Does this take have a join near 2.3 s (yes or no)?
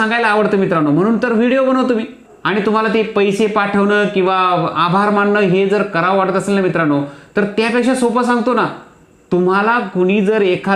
yes